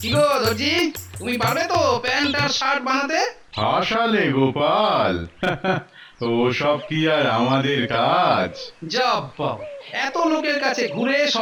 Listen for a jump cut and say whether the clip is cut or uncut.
uncut